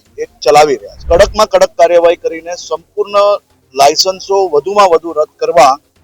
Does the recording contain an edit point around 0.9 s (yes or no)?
yes